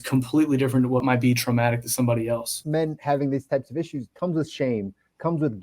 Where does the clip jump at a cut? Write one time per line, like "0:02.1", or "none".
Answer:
0:01.0
0:02.6
0:04.0